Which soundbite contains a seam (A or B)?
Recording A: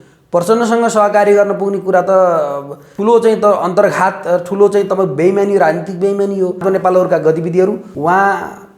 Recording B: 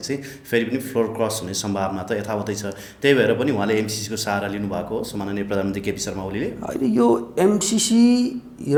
A